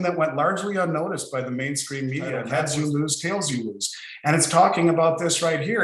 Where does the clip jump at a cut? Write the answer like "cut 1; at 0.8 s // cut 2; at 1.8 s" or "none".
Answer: cut 1; at 2.5 s